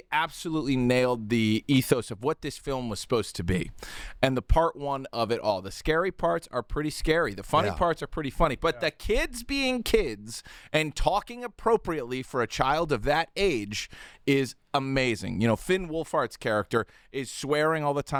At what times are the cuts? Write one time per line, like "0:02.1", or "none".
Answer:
none